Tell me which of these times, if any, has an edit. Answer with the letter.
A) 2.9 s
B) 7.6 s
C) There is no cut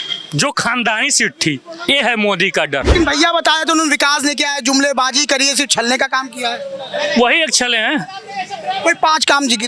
A